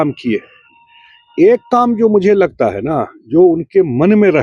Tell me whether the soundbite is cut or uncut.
uncut